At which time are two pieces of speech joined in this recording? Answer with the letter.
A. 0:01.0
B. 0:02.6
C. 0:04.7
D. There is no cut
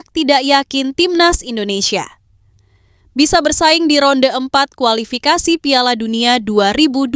D